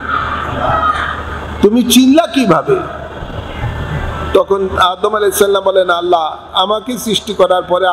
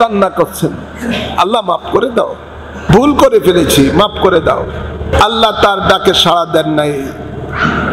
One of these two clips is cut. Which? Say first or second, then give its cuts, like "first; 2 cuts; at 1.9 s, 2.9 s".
second; 2 cuts; at 2.8 s, 5.0 s